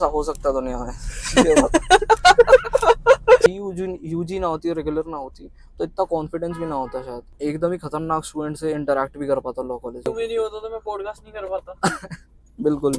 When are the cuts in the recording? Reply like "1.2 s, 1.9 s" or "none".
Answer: 3.5 s, 7.2 s, 10.1 s